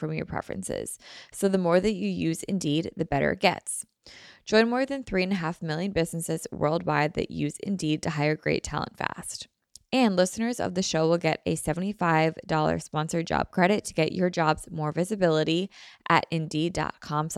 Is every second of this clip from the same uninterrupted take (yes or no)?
yes